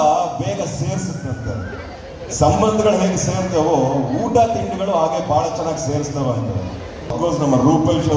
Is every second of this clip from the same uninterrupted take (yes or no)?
no